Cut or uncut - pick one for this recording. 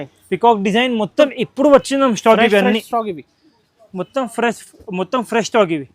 cut